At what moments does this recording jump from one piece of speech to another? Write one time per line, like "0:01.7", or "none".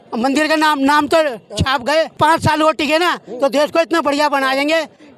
0:02.2